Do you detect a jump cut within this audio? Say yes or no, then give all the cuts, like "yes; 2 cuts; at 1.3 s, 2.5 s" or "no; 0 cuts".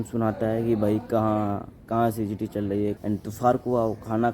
yes; 1 cut; at 3.0 s